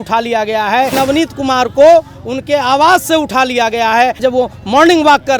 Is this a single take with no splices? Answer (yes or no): no